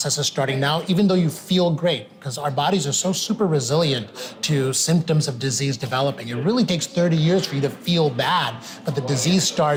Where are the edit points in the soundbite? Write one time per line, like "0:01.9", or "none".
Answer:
none